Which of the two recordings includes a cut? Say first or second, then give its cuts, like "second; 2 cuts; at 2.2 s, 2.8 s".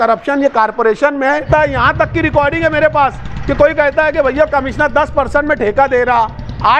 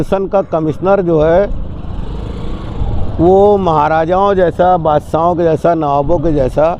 first; 1 cut; at 1.5 s